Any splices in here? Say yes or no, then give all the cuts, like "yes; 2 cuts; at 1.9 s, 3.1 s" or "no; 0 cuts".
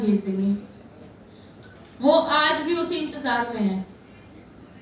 no; 0 cuts